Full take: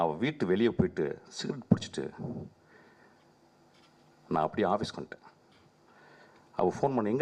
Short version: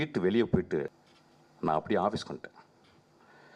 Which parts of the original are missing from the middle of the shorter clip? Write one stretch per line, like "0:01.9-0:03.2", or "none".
0:01.3-0:03.7